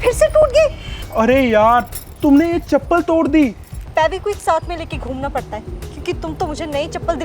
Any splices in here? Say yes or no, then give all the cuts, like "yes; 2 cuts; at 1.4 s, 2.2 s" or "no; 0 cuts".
yes; 1 cut; at 3.7 s